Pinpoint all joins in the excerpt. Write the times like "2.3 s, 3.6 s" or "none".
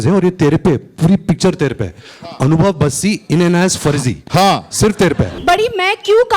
5.3 s

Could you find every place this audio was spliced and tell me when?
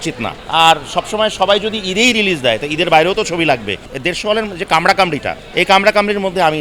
3.9 s, 5.4 s

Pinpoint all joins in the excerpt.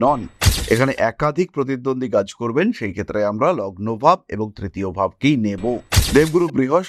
5.9 s

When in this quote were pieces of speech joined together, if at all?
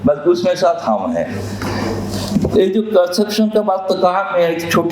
none

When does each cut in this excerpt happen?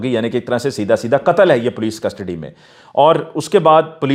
none

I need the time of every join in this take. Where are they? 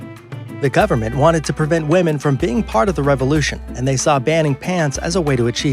4.2 s

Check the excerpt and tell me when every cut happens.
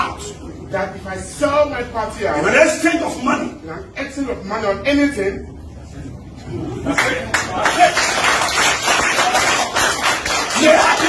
none

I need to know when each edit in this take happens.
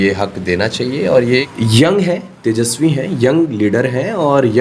1.5 s

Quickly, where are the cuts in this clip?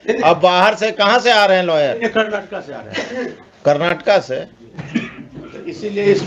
none

